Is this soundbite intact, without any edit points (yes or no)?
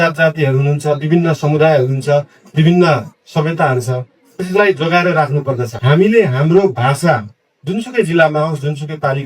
no